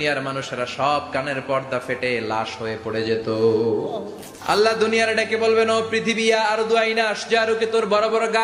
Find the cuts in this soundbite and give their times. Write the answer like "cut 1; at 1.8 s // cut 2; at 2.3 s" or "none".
none